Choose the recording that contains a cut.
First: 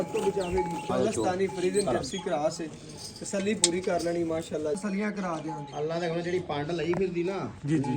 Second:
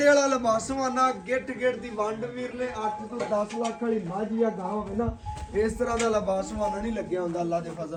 first; 2 cuts; at 0.9 s, 4.8 s

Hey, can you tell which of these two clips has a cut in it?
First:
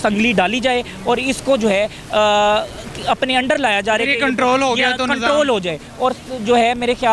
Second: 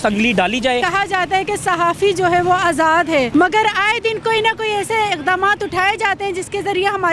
second; 2 cuts; at 0.8 s, 3.3 s

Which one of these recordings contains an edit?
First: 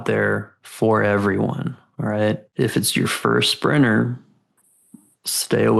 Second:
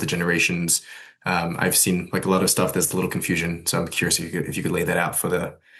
first; 1 cut; at 2.5 s

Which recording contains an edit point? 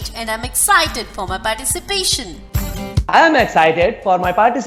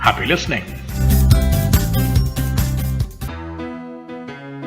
second; 1 cut; at 3.2 s

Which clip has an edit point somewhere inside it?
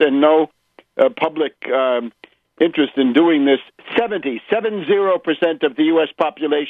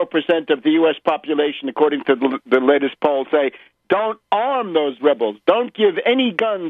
second; 1 cut; at 5.7 s

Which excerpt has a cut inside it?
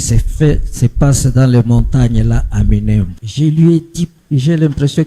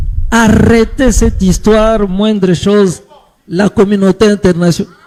first; 2 cuts; at 3.2 s, 4.2 s

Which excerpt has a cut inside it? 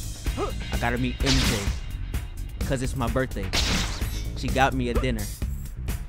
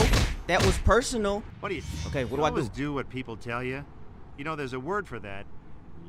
second; 1 cut; at 1.5 s

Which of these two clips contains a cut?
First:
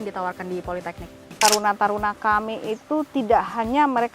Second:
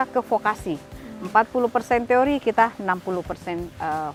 first; 1 cut; at 1.3 s

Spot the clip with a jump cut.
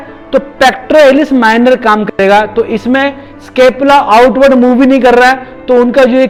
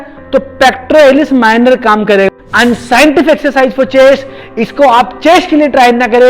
second; 2 cuts; at 2.3 s, 4.4 s

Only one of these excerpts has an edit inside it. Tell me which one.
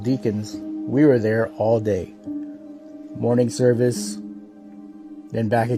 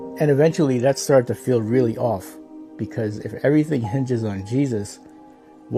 first; 1 cut; at 1.1 s

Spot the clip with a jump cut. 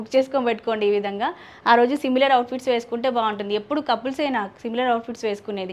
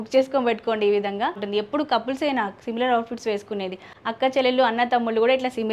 second; 1 cut; at 1.4 s

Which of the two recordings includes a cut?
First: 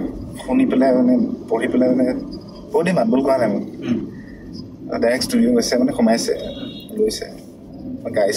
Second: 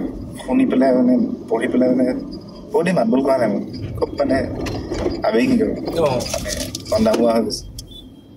second; 1 cut; at 3.8 s

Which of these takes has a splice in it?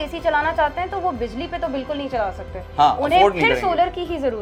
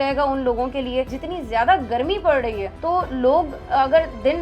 second; 2 cuts; at 1.1 s, 2.7 s

